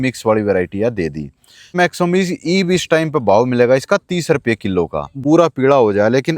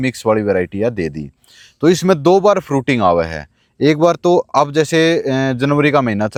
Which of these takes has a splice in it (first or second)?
first